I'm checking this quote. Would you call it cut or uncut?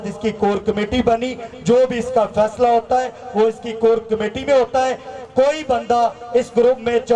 uncut